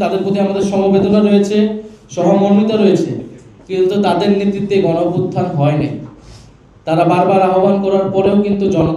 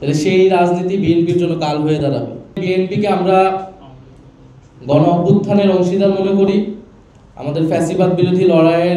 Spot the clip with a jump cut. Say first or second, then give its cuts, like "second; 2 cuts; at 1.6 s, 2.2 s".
second; 1 cut; at 2.6 s